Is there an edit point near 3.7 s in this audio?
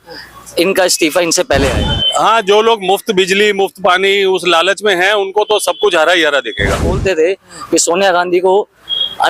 no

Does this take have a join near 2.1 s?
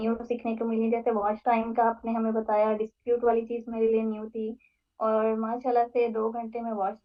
no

